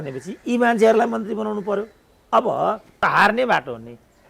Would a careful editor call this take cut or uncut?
cut